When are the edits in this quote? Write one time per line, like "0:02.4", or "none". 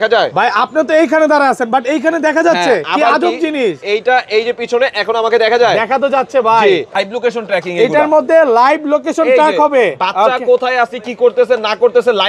0:06.9